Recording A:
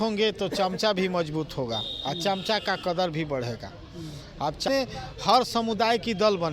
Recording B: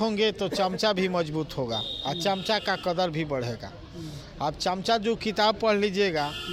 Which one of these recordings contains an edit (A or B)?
A